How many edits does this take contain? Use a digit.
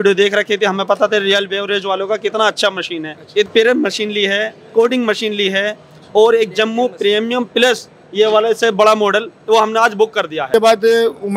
2